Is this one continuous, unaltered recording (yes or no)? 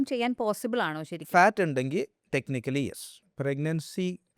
no